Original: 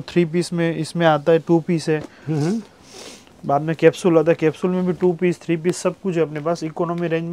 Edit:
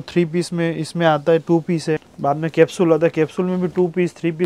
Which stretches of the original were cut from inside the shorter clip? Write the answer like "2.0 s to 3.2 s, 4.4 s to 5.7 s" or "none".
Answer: 2.1 s to 3.3 s